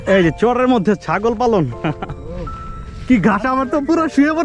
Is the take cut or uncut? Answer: uncut